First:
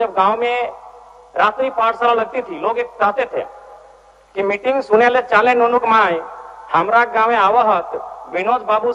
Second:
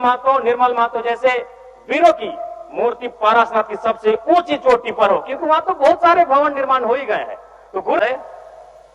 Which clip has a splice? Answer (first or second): second